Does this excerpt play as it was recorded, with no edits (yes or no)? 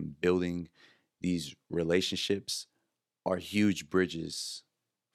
yes